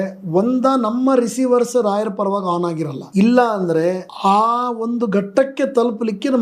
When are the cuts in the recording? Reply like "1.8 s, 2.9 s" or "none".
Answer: 3.0 s, 4.1 s